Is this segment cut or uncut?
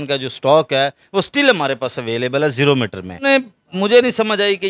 cut